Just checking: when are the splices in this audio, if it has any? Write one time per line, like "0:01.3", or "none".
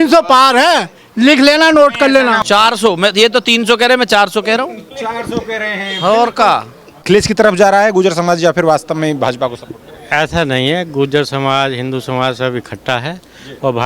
0:02.4
0:07.0